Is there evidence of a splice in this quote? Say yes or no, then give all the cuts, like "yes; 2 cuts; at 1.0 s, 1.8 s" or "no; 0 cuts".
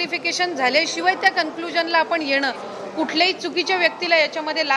yes; 1 cut; at 2.7 s